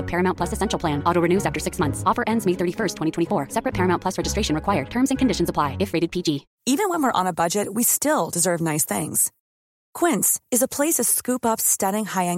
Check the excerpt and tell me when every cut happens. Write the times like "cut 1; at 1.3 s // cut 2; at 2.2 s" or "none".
cut 1; at 6.5 s